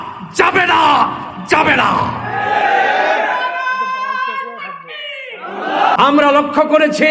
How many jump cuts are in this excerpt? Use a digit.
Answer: 1